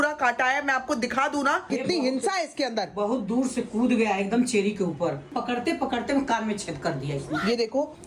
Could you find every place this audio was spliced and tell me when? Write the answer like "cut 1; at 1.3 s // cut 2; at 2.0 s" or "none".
cut 1; at 1.7 s // cut 2; at 5.3 s